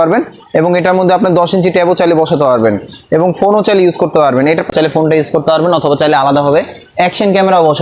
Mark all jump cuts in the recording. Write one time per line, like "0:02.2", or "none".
0:04.7